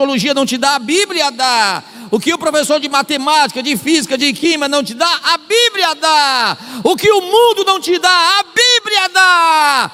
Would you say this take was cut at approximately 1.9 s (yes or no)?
no